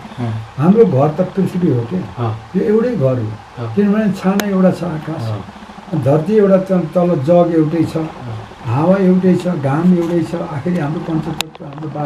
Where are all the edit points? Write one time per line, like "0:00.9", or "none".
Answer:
none